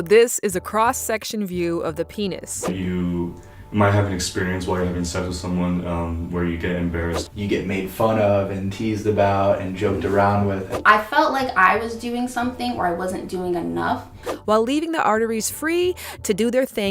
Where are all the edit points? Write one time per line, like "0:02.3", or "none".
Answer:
0:02.7
0:07.2
0:10.7
0:14.3